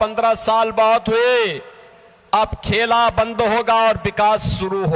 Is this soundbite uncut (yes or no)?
yes